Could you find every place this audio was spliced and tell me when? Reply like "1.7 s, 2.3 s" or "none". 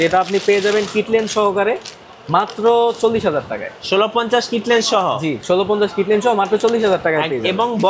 none